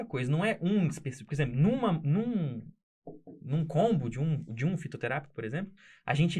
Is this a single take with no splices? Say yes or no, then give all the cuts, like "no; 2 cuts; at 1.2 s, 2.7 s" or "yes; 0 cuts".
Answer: yes; 0 cuts